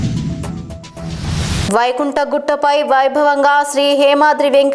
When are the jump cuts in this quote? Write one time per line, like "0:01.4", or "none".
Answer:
0:01.7